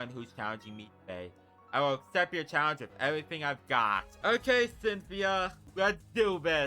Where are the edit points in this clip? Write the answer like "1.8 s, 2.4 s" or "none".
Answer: 4.1 s, 5.6 s